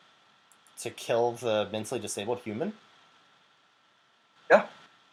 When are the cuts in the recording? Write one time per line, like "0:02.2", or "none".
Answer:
none